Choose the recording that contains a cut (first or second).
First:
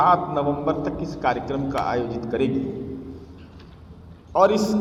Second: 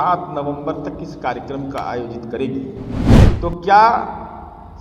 second